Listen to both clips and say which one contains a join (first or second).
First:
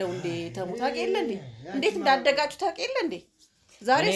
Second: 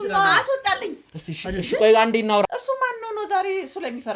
second